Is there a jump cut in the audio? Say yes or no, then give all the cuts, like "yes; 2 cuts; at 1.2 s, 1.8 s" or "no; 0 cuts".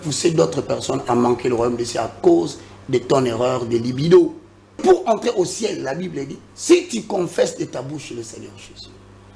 yes; 1 cut; at 4.8 s